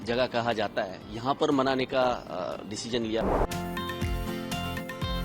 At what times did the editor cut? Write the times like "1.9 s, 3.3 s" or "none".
3.2 s